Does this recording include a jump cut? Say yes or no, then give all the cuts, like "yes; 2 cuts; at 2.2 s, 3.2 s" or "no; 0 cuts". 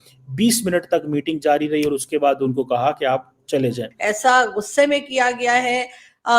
yes; 1 cut; at 3.9 s